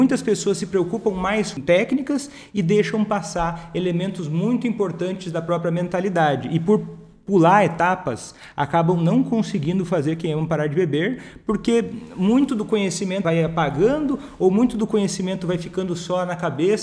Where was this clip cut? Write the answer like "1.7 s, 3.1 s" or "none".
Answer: 1.5 s, 13.2 s